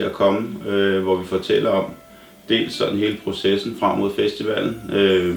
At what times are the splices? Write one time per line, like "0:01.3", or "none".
none